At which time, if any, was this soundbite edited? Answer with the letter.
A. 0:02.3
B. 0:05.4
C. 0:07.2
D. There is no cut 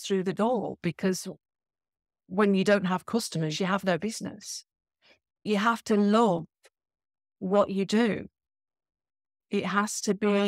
B